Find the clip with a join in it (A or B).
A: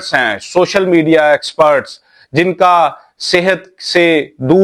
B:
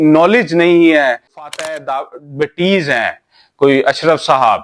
B